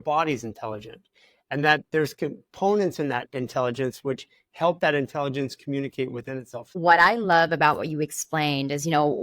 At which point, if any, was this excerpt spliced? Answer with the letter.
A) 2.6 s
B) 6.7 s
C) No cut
B